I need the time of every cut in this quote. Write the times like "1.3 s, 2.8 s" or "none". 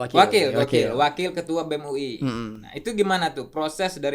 none

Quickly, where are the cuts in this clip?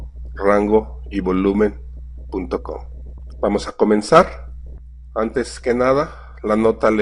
none

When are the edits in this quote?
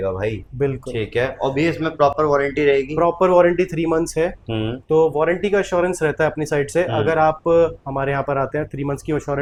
none

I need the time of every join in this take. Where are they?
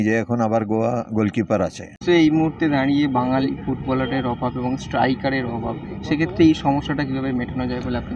2.0 s

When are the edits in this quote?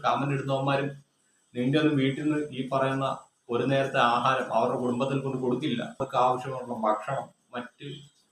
6.1 s

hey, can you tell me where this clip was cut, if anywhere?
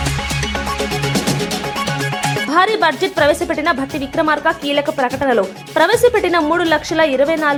none

